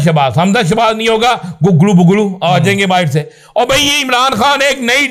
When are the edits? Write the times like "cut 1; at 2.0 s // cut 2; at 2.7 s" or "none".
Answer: none